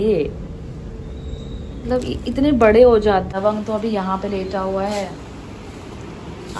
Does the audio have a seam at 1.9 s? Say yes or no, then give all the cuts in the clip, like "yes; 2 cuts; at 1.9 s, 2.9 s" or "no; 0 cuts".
no; 1 cut; at 3.3 s